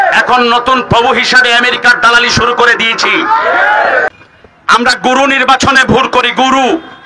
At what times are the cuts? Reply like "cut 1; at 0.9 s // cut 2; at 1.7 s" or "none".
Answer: cut 1; at 4.1 s